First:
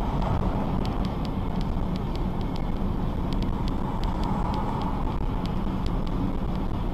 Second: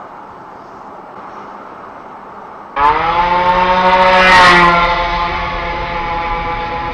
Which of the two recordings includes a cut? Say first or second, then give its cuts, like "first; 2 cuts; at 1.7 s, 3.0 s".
second; 1 cut; at 2.7 s